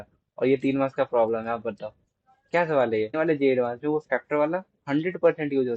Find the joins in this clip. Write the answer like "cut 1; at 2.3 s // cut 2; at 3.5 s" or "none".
cut 1; at 3.1 s